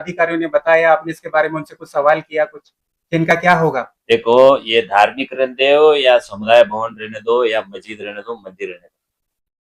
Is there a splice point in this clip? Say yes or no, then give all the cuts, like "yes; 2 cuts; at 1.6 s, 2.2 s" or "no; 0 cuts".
no; 0 cuts